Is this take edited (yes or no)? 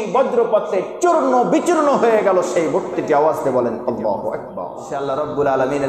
yes